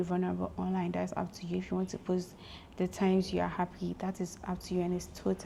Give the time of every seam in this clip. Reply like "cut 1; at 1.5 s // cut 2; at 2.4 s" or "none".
none